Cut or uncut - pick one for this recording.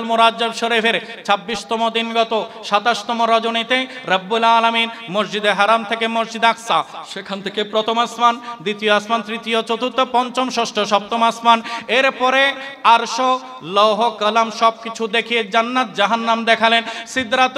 uncut